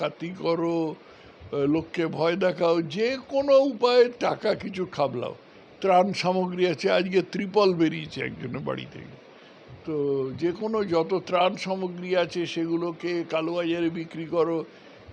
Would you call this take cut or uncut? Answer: uncut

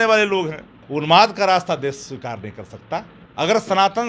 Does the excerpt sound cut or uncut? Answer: cut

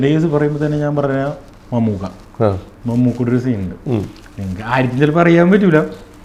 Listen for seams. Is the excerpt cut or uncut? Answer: uncut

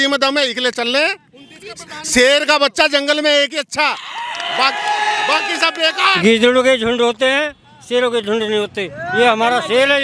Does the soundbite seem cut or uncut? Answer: cut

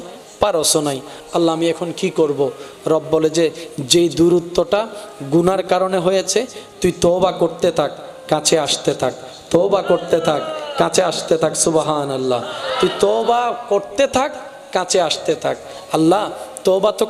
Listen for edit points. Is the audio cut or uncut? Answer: uncut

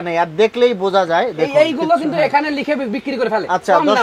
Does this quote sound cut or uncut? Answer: uncut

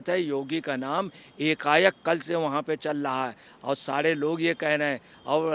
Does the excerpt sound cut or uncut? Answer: uncut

